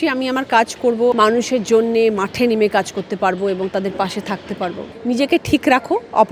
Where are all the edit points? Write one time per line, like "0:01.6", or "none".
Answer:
0:01.2
0:04.8

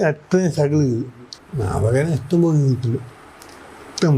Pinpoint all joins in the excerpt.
0:01.3

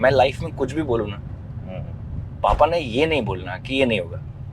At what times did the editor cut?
none

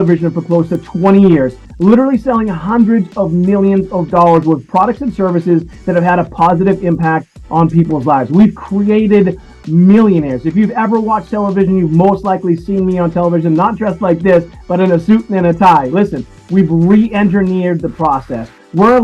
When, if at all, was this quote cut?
none

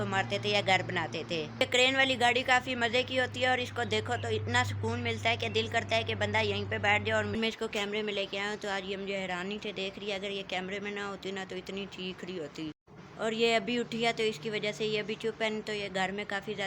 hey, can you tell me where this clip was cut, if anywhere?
0:07.3

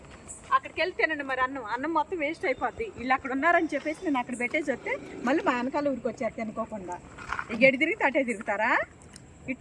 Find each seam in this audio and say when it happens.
none

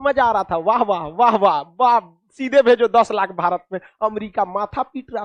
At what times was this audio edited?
none

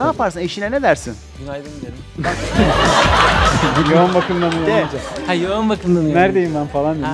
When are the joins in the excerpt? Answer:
none

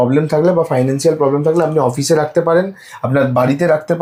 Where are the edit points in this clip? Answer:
none

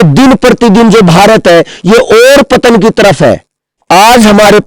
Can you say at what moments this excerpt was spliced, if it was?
0:03.8

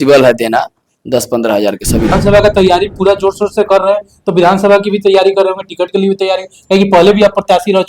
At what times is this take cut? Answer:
0:02.1

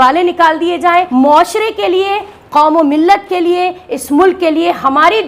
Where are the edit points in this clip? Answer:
0:01.1

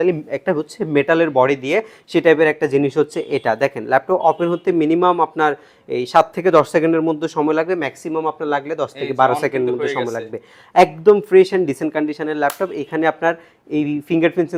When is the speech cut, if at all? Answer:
none

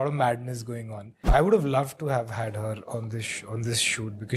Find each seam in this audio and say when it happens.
0:01.2

